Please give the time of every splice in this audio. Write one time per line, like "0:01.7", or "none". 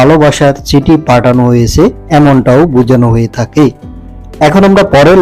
none